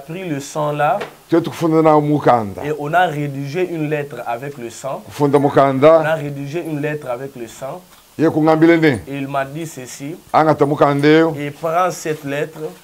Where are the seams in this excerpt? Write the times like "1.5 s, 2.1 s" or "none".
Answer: none